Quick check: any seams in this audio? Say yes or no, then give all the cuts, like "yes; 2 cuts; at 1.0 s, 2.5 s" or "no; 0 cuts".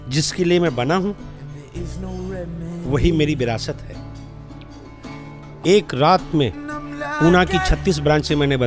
yes; 1 cut; at 5.5 s